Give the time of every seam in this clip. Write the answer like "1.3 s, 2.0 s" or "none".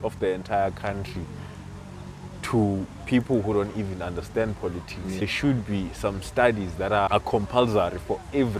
5.2 s, 7.1 s